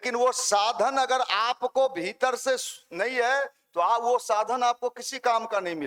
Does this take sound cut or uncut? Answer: uncut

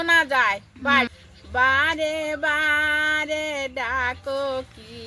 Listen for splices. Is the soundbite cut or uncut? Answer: cut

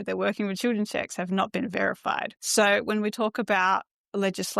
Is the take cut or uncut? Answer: cut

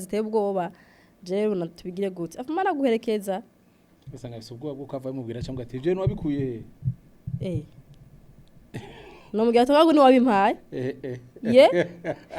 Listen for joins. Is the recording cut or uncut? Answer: uncut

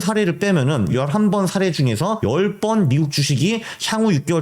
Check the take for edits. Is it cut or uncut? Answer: cut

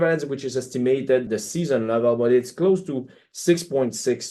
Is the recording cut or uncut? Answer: uncut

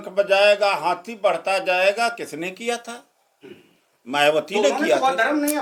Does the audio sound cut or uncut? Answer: uncut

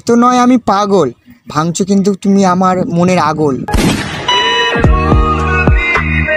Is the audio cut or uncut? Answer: uncut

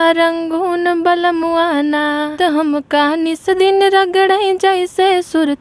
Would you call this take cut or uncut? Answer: cut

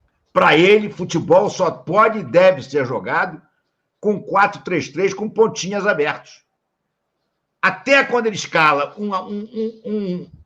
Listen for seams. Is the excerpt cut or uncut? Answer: uncut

